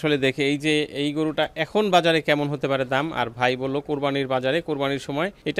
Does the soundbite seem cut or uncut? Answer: uncut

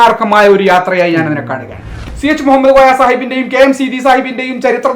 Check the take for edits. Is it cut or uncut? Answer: cut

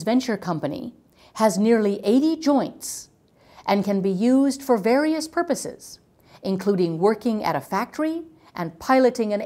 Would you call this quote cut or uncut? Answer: uncut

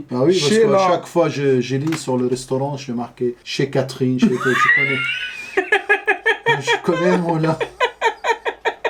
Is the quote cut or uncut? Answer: uncut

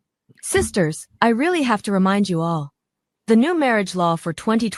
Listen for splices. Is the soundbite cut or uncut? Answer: uncut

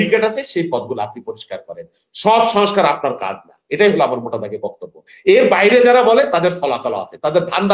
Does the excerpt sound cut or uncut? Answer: uncut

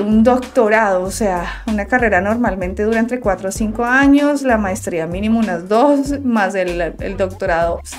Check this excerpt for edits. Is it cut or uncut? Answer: uncut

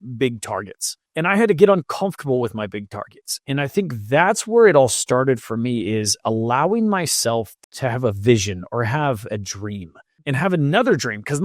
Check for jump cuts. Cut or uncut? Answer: cut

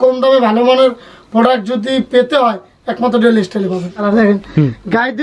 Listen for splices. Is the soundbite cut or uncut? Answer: cut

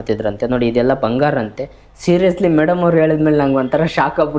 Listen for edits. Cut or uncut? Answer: uncut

